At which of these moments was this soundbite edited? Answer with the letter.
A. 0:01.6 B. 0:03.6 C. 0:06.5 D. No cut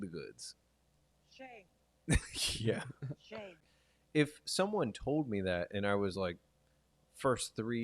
B